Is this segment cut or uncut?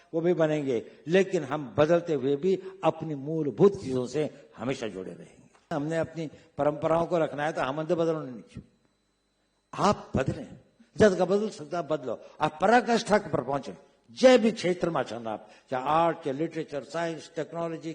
cut